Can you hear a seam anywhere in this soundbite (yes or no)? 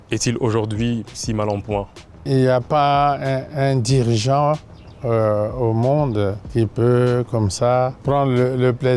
yes